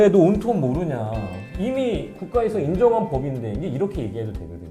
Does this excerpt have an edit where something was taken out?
no; 0 cuts

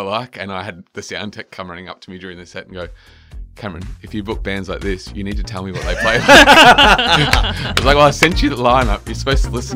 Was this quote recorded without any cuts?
yes; 0 cuts

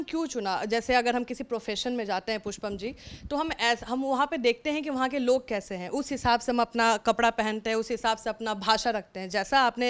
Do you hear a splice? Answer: no; 0 cuts

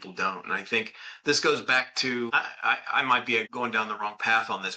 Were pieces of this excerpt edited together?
yes; 2 cuts; at 2.3 s, 3.5 s

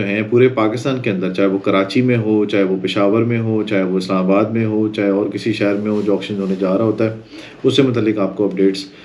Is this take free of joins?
yes; 0 cuts

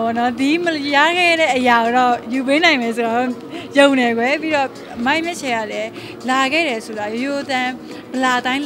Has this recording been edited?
no; 0 cuts

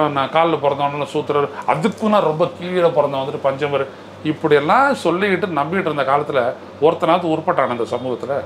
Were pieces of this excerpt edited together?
no; 0 cuts

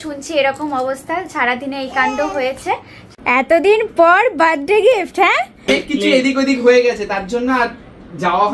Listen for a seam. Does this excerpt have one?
yes; 2 cuts; at 3.2 s, 5.7 s

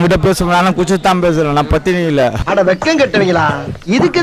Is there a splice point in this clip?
no; 0 cuts

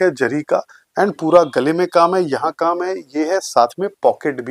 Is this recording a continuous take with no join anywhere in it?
yes; 0 cuts

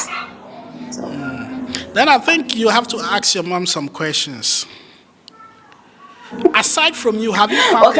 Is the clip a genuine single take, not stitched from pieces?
yes; 0 cuts

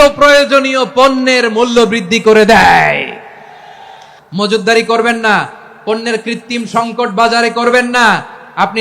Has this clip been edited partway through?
yes; 1 cut; at 4.1 s

